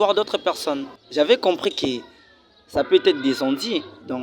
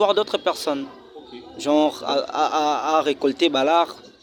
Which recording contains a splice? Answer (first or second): first